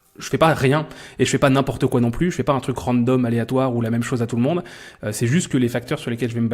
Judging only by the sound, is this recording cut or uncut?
uncut